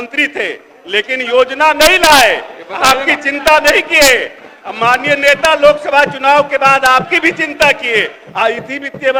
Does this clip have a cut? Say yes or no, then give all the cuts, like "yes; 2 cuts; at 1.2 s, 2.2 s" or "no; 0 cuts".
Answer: no; 0 cuts